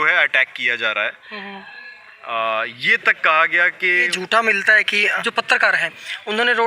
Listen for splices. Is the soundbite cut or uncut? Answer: cut